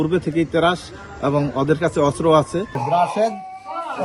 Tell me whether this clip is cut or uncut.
cut